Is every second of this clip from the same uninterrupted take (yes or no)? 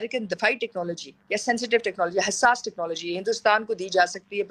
yes